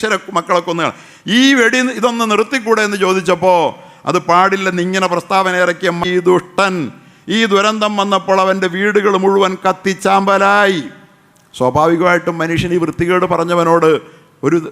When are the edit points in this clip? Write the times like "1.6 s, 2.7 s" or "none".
6.0 s

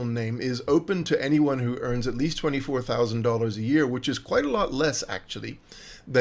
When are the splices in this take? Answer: none

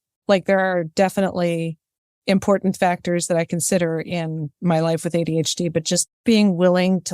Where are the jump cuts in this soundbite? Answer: 6.2 s

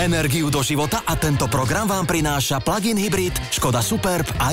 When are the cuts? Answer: none

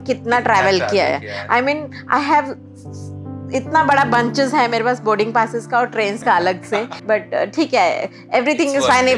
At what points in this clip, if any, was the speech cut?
6.9 s

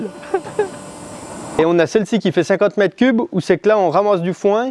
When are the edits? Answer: 1.6 s

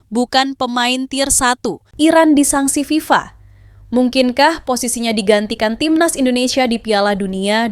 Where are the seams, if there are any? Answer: 1.9 s

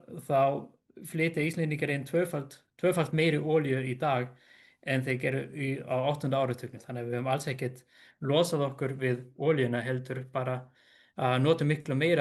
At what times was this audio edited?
6.8 s

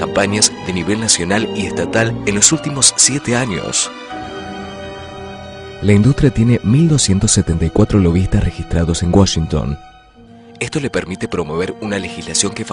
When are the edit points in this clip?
10.8 s

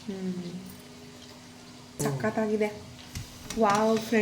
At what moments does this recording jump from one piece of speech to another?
2.0 s

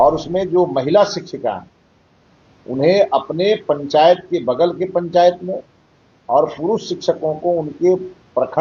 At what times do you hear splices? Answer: none

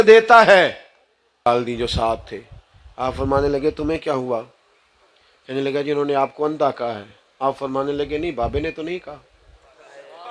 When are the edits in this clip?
1.5 s

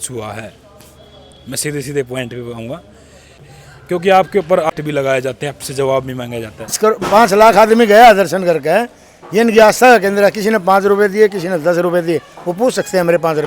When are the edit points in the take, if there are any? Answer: 3.5 s, 4.7 s, 6.7 s

